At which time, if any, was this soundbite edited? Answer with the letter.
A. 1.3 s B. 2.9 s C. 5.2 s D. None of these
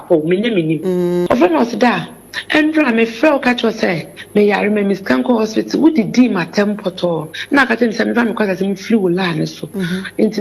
A